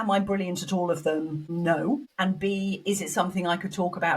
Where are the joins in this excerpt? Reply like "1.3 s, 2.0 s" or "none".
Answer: 1.4 s, 2.1 s